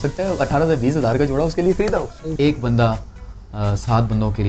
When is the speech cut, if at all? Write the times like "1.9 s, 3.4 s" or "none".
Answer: 2.3 s